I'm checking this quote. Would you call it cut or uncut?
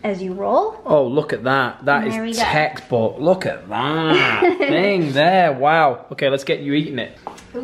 uncut